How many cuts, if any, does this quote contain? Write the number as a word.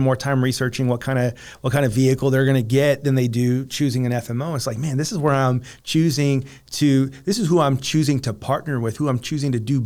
zero